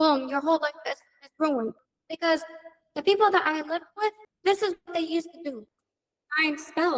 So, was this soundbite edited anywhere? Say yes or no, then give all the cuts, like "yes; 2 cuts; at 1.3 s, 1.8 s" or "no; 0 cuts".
yes; 1 cut; at 5.7 s